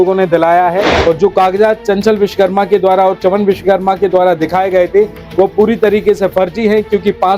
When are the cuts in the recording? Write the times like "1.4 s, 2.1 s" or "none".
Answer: 0.9 s